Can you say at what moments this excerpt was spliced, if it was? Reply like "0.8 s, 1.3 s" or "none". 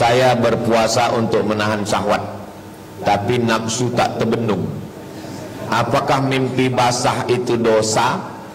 none